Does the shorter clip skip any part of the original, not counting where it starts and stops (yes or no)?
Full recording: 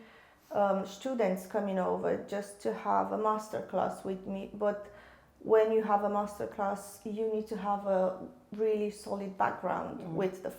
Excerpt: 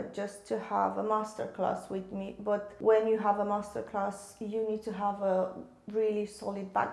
yes